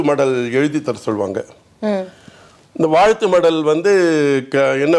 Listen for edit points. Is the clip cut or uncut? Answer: uncut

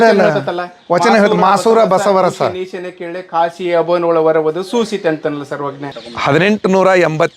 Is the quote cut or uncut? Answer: cut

